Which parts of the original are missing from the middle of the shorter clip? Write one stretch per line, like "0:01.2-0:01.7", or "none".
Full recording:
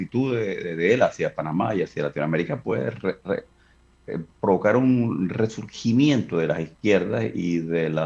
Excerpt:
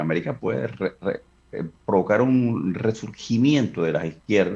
0:03.6-0:03.9